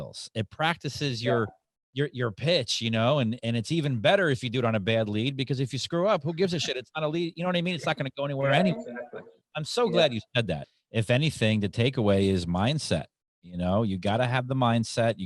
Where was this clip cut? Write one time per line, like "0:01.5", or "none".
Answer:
0:10.6